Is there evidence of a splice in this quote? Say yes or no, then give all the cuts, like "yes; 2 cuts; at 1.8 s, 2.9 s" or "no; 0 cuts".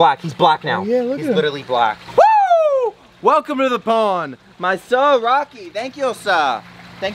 no; 0 cuts